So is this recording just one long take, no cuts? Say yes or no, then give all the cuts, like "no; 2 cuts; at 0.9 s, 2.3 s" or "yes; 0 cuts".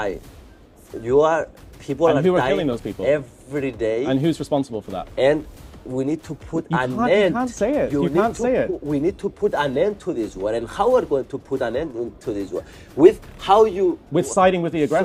yes; 0 cuts